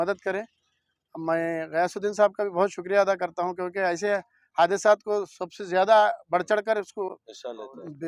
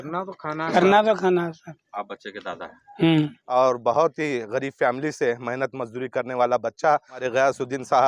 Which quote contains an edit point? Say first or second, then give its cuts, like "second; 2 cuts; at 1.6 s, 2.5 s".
second; 3 cuts; at 1.7 s, 3.4 s, 7.3 s